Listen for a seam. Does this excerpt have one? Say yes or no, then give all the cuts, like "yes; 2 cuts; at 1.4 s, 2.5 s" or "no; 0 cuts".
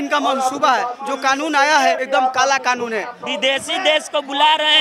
yes; 3 cuts; at 1.0 s, 2.0 s, 3.2 s